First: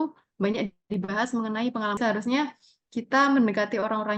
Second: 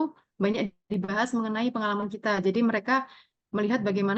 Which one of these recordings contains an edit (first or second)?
first